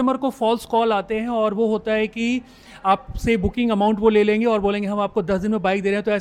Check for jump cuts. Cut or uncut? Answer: uncut